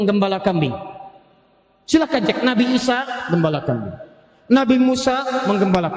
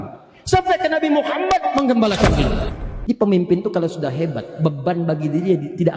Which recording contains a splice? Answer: second; 1 cut; at 2.6 s

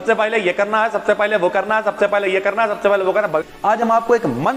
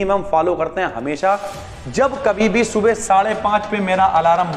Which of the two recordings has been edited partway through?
first; 1 cut; at 3.5 s

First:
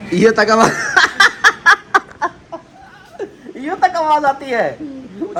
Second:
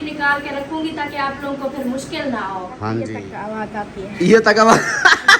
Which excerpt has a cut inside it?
second; 1 cut; at 3.1 s

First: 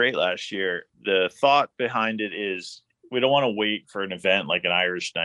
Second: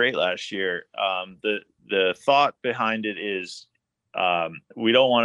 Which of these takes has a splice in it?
first; 2 cuts; at 0.9 s, 3.0 s

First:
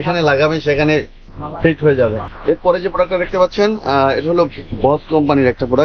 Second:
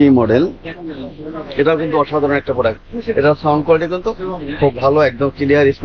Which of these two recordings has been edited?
first; 1 cut; at 2.3 s

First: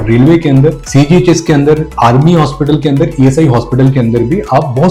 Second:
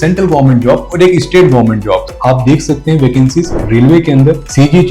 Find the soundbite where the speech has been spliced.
second; 1 cut; at 2.1 s

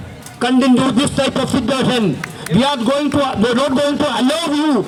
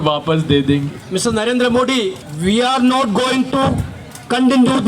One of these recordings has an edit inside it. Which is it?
second; 2 cuts; at 1.0 s, 2.2 s

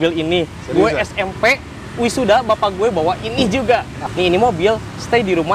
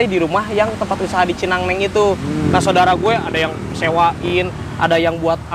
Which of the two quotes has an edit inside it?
first; 1 cut; at 4.0 s

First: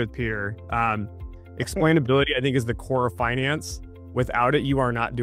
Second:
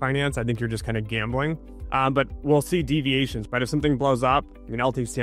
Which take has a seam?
second; 2 cuts; at 1.7 s, 3.4 s

